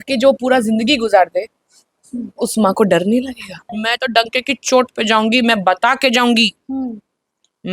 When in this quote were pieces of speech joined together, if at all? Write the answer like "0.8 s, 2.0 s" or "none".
3.7 s